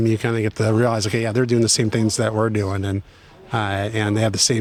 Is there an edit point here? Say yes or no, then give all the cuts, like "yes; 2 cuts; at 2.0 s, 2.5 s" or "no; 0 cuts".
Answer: no; 0 cuts